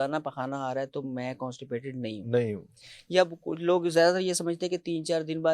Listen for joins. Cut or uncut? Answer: uncut